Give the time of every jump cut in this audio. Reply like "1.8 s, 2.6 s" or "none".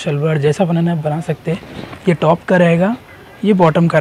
none